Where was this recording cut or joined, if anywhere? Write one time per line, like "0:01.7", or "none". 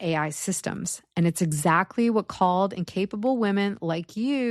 none